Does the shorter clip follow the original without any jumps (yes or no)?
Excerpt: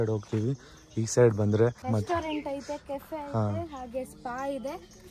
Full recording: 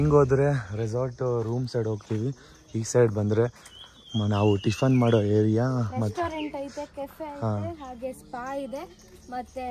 no